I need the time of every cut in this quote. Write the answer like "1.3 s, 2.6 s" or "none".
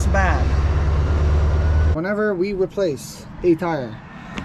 1.9 s